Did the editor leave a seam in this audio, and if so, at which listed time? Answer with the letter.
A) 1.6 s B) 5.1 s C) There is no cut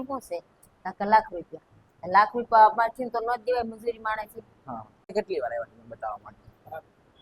B